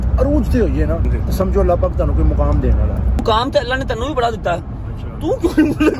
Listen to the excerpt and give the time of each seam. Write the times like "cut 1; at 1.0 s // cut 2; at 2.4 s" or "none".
cut 1; at 1.1 s // cut 2; at 3.2 s